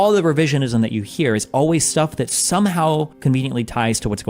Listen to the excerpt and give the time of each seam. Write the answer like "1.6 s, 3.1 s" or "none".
3.1 s